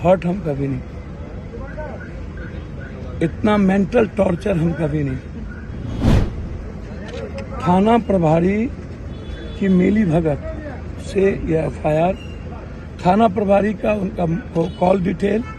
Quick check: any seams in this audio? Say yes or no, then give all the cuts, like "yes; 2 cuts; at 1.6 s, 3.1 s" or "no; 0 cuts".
no; 0 cuts